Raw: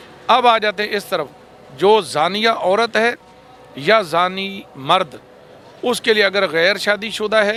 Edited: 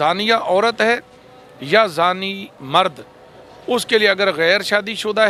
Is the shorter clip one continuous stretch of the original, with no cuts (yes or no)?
yes